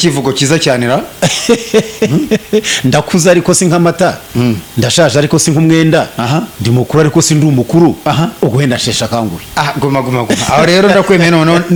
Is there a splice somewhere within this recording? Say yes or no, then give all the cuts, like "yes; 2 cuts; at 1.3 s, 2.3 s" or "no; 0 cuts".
no; 0 cuts